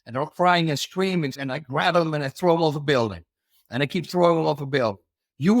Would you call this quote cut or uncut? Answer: cut